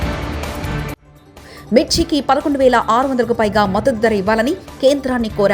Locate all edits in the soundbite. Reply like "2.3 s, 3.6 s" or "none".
1.1 s